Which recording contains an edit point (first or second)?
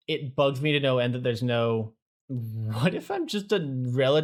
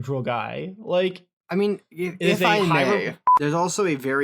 second